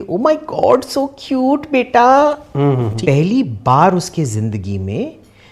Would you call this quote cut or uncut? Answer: cut